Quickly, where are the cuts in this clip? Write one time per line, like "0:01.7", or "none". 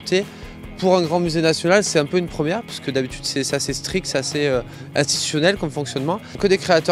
0:01.6